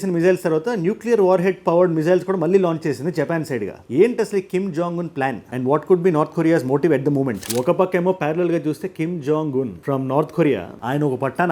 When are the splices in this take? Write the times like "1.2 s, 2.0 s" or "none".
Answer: 7.4 s